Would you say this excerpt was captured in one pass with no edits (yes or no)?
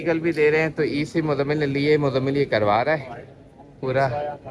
yes